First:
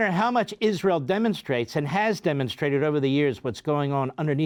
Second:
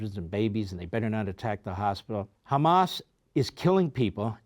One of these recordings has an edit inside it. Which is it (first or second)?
second